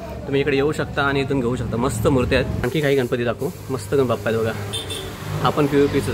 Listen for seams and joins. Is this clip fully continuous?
no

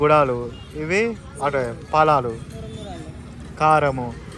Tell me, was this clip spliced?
no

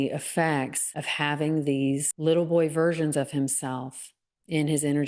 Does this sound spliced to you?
no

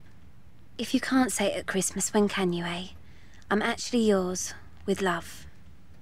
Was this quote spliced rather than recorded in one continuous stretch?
no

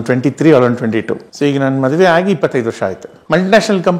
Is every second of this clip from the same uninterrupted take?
no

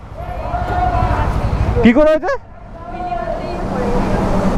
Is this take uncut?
yes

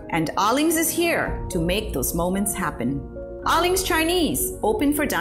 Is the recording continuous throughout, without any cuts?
yes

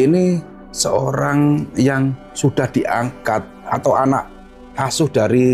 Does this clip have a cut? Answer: no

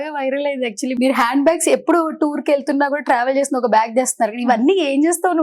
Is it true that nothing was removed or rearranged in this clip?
no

